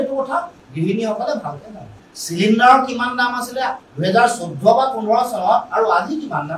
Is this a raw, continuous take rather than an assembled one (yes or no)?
yes